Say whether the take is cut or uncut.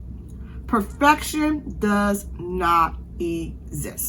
uncut